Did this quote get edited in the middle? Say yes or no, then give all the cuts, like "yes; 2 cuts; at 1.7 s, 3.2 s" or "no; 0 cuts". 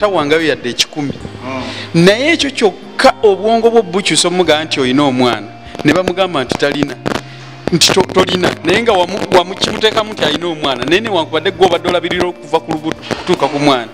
no; 0 cuts